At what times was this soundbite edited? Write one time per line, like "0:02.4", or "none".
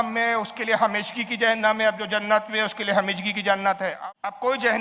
0:03.9